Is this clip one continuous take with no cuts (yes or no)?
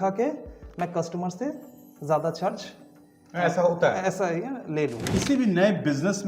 no